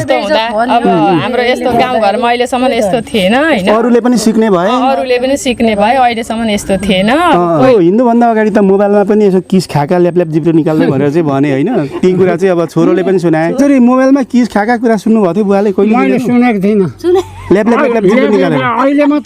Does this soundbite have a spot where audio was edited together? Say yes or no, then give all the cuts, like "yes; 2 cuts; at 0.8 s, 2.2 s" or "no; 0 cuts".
yes; 2 cuts; at 7.7 s, 13.6 s